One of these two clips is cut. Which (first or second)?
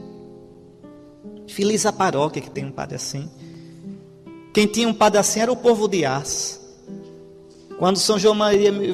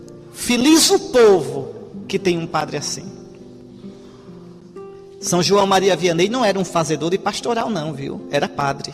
second